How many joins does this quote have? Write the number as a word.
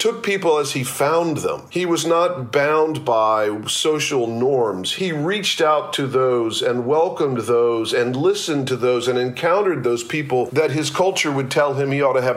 three